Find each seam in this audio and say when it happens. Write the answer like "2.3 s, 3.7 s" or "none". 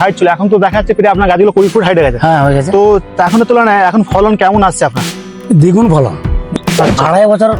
6.5 s